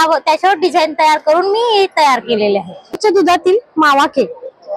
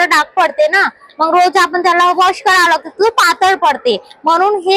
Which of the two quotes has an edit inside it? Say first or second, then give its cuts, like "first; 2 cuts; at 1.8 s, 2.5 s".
first; 1 cut; at 2.8 s